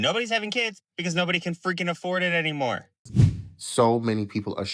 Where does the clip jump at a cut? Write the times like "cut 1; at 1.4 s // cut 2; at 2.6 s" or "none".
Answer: cut 1; at 3.0 s